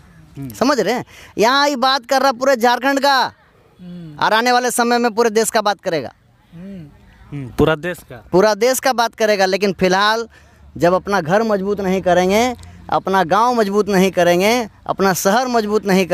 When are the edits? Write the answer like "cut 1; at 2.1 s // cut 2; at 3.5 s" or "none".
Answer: none